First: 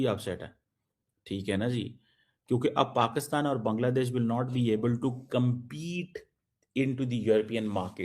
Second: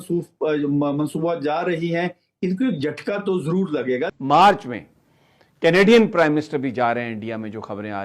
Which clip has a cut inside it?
second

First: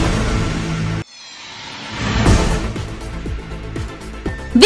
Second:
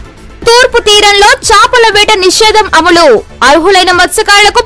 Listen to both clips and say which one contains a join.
first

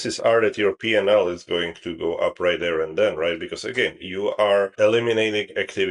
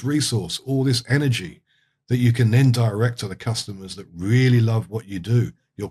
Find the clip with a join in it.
first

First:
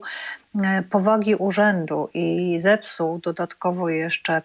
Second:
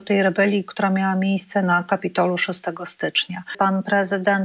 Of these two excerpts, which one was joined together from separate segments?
second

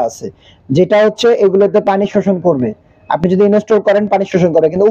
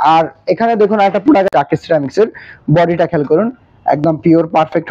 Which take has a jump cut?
second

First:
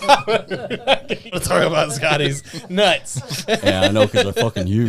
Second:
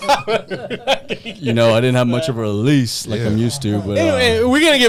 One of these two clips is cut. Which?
first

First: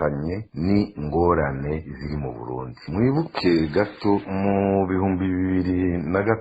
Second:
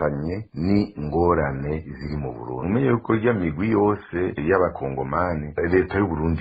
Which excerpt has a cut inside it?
second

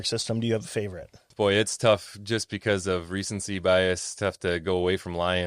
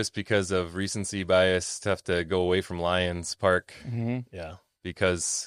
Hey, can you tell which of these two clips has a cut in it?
first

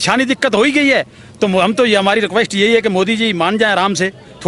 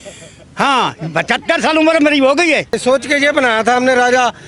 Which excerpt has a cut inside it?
second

